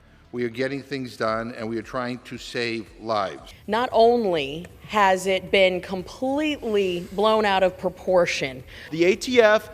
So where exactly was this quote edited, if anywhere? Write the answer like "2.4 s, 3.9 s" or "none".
3.5 s, 8.8 s